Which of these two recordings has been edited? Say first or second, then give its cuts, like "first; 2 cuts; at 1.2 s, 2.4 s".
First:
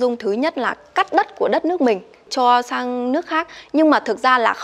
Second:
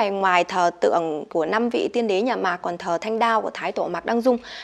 second; 1 cut; at 1.3 s